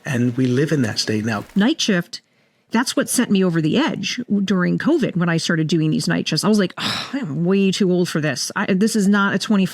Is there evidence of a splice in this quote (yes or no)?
yes